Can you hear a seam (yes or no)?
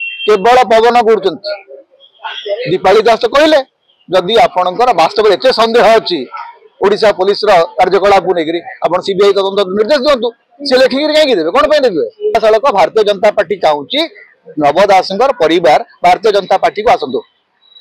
yes